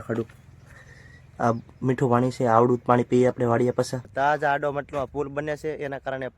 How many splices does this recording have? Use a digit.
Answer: 1